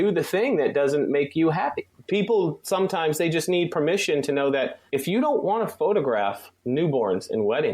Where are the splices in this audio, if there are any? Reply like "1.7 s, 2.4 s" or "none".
1.9 s, 4.8 s, 6.5 s